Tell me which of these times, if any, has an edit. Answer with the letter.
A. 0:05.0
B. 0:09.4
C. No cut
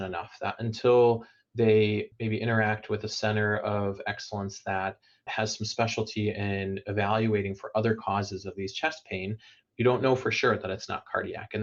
C